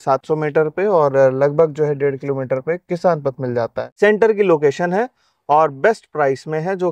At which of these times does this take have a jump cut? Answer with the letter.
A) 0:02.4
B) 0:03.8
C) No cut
B